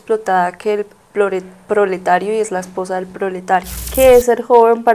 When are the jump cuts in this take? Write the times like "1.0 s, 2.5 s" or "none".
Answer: 3.8 s